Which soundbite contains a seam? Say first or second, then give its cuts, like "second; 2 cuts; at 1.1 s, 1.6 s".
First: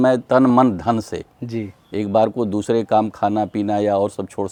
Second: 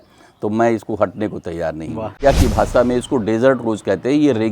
second; 1 cut; at 2.2 s